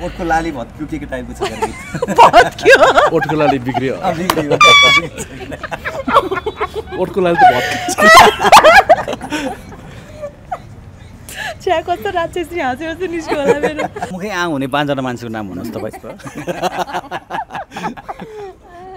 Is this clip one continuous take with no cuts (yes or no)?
no